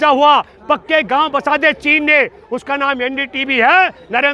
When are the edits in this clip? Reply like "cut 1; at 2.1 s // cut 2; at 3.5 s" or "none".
none